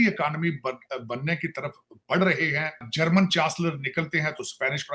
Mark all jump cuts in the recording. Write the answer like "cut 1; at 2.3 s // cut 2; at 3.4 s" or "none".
cut 1; at 2.9 s